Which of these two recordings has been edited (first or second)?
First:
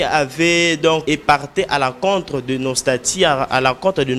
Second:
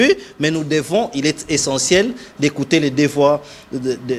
first